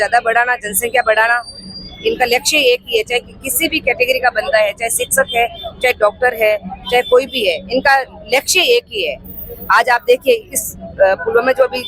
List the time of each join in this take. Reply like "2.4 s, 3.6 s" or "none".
none